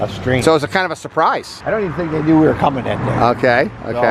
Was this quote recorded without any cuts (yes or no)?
yes